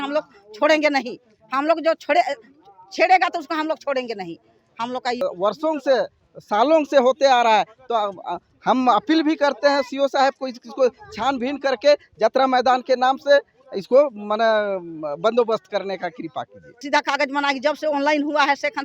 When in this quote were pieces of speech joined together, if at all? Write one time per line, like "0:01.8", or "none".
0:05.2
0:16.8